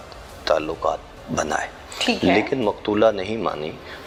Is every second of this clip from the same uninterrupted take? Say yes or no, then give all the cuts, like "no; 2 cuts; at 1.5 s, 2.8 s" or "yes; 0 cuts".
yes; 0 cuts